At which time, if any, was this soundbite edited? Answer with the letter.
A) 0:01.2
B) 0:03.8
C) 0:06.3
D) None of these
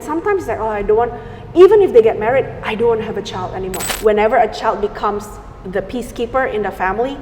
B